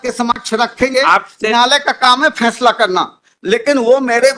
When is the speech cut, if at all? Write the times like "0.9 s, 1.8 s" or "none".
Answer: none